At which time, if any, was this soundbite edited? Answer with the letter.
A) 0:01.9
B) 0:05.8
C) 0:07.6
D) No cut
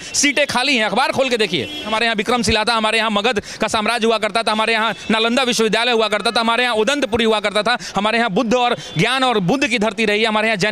A